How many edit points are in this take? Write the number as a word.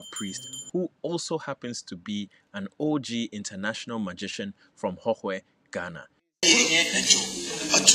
zero